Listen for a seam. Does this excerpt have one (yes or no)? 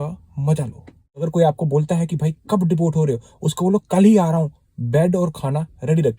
yes